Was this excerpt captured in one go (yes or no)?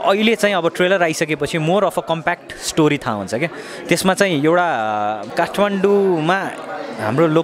no